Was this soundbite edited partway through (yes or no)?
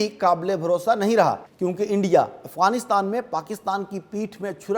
yes